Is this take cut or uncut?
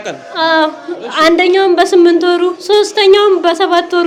uncut